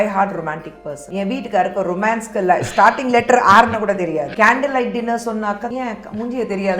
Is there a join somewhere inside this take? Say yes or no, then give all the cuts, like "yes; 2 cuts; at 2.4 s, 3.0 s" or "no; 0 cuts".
yes; 3 cuts; at 1.0 s, 4.3 s, 5.6 s